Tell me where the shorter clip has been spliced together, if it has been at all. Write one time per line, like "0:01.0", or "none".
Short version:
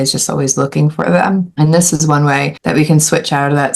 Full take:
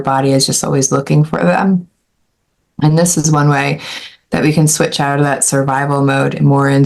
0:01.5
0:02.6